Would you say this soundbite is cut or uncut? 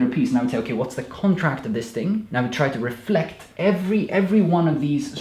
cut